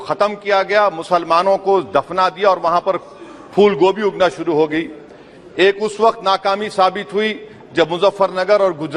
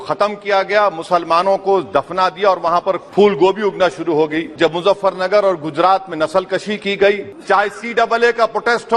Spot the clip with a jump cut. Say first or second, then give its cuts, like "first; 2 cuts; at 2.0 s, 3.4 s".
second; 3 cuts; at 3.0 s, 4.5 s, 7.3 s